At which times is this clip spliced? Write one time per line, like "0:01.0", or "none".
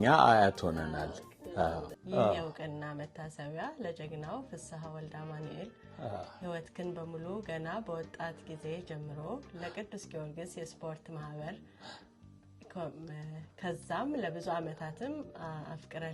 0:01.9